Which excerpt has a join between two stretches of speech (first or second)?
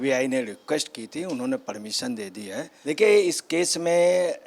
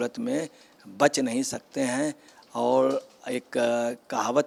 first